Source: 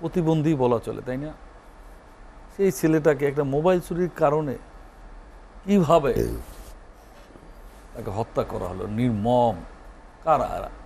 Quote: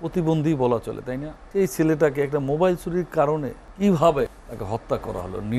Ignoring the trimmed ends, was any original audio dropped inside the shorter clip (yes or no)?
yes